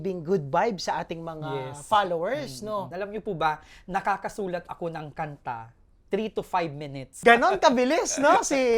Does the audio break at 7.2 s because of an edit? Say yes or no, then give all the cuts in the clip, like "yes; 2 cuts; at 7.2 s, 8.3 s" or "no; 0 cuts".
yes; 2 cuts; at 2.9 s, 7.2 s